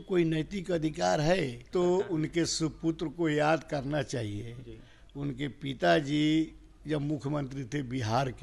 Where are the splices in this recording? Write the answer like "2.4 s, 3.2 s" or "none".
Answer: 1.7 s